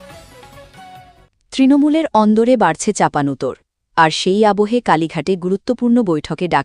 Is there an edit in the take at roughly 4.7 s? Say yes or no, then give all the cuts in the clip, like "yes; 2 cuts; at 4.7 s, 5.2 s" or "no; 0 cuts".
no; 1 cut; at 1.3 s